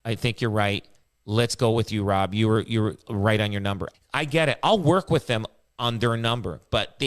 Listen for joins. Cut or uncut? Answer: cut